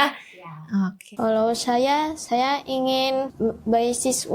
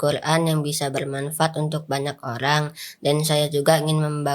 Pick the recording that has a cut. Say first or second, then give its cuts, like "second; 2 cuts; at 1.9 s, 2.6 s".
first; 2 cuts; at 1.0 s, 3.3 s